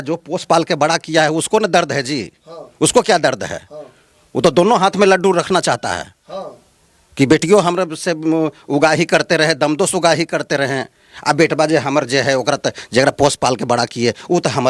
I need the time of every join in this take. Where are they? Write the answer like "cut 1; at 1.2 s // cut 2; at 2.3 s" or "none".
none